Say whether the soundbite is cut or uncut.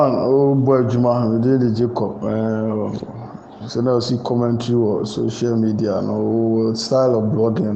uncut